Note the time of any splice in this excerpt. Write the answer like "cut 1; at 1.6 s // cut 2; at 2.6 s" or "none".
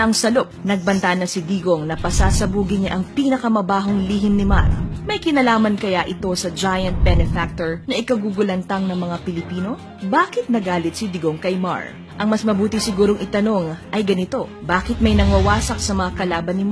cut 1; at 13.7 s